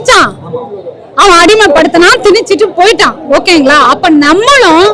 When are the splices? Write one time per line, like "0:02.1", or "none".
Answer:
none